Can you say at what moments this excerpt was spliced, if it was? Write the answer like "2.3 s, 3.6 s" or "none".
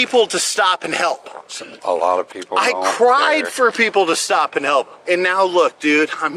5.0 s